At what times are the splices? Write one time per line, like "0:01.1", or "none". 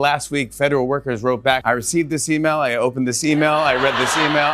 none